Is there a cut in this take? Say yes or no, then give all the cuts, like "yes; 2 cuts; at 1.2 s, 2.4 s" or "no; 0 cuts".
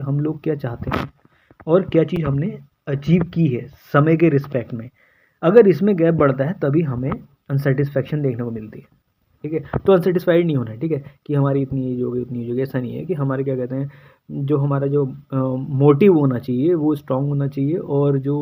no; 0 cuts